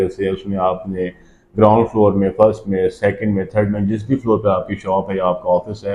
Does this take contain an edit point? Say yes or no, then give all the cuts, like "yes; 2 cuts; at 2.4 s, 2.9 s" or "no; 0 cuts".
no; 0 cuts